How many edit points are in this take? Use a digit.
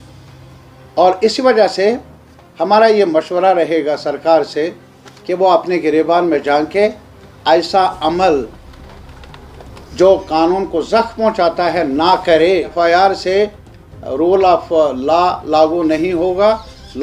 1